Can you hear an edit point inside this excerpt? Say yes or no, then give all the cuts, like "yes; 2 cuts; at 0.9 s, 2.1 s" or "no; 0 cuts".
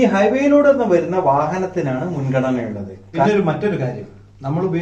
yes; 1 cut; at 3.2 s